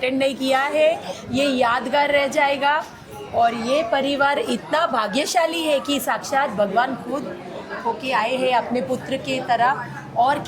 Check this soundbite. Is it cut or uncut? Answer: uncut